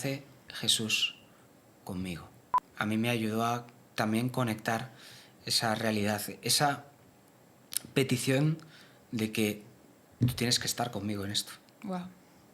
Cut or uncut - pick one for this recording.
cut